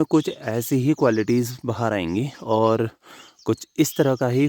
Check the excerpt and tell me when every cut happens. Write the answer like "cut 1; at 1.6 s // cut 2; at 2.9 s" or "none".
none